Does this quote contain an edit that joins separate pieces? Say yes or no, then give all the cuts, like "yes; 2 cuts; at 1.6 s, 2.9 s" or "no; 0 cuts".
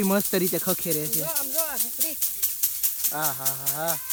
no; 0 cuts